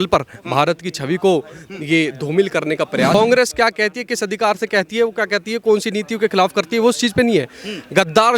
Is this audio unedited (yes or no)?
no